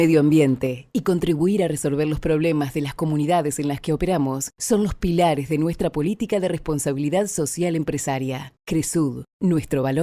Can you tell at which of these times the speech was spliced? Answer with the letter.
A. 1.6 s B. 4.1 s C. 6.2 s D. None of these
D